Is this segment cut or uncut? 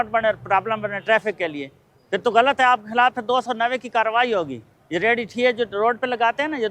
uncut